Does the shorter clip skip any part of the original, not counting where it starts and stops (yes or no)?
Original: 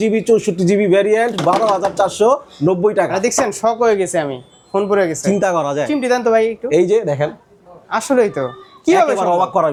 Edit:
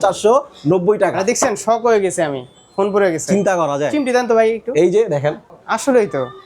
yes